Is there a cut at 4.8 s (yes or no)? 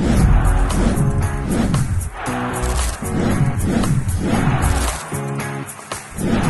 no